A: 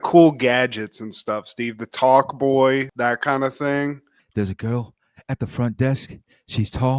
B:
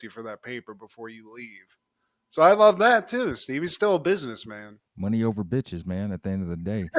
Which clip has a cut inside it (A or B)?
A